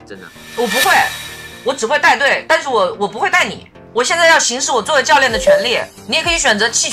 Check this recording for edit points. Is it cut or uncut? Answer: cut